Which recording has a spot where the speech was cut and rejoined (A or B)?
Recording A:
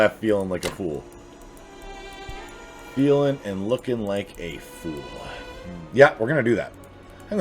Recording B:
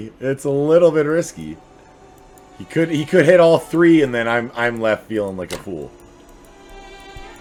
A